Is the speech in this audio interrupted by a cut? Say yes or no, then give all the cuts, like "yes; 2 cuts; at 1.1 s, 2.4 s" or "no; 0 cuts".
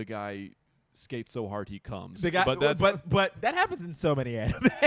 no; 0 cuts